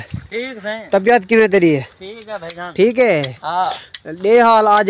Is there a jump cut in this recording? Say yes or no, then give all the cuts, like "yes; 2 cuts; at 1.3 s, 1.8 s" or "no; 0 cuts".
no; 0 cuts